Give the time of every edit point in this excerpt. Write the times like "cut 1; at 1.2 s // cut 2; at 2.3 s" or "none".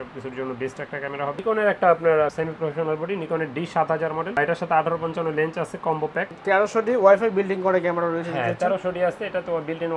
cut 1; at 1.4 s // cut 2; at 6.3 s